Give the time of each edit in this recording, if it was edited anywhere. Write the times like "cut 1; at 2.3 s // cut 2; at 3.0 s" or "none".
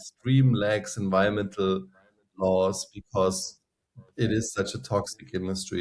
none